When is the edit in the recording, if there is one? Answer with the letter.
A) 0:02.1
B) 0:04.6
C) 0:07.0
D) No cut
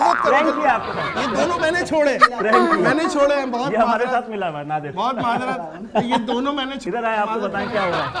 D